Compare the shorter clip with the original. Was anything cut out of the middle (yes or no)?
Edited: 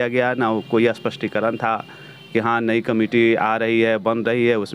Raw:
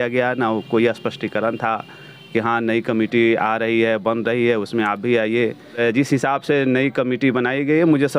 no